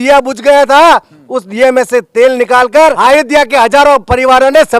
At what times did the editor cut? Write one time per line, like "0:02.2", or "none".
0:03.0